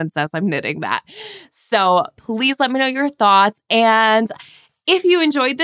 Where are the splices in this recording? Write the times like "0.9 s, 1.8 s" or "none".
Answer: none